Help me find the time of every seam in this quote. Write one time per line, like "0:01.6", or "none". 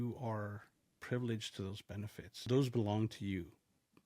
0:01.0
0:02.5

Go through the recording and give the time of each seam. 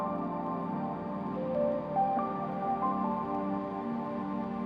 none

